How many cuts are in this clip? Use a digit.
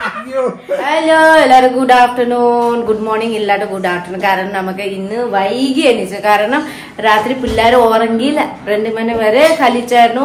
1